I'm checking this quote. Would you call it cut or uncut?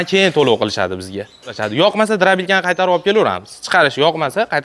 cut